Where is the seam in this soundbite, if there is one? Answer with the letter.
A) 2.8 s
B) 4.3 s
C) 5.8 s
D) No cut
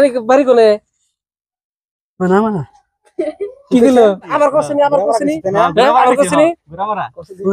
B